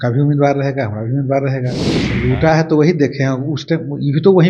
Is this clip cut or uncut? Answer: cut